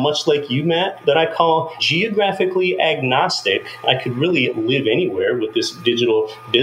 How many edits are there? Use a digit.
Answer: 2